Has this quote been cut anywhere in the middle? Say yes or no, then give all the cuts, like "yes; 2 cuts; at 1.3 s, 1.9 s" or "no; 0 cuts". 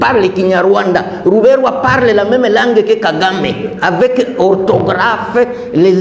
no; 0 cuts